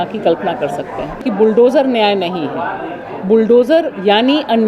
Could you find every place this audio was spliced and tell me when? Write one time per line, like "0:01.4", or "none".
0:01.2